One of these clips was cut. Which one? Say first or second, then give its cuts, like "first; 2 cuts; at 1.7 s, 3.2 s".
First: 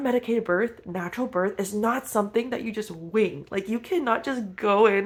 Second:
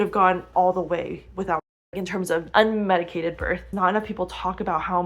second; 2 cuts; at 1.9 s, 3.7 s